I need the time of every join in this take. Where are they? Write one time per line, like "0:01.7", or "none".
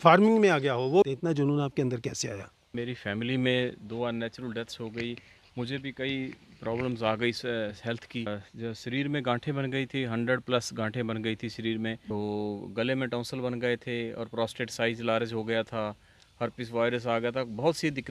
0:01.1
0:02.7
0:08.4
0:12.0